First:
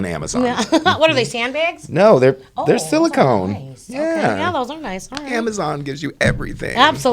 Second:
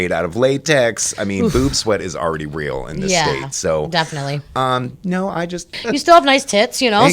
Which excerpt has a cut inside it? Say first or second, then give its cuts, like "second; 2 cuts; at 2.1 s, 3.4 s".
second; 1 cut; at 5.8 s